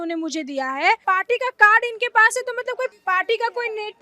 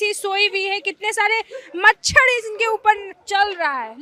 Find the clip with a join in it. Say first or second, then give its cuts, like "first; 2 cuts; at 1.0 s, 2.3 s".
first; 2 cuts; at 1.0 s, 2.9 s